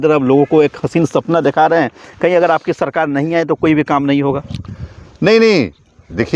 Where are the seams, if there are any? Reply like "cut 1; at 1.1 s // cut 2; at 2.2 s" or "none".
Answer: none